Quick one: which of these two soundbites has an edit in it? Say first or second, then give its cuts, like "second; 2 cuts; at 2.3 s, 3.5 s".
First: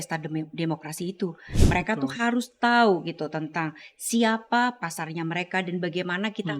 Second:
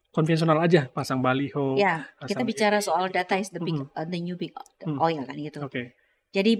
first; 1 cut; at 1.5 s